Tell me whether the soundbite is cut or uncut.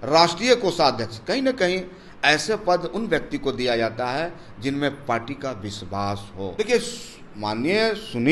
cut